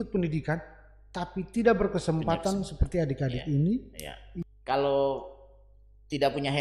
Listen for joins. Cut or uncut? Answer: cut